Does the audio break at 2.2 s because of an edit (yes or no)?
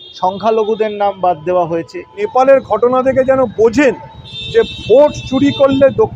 yes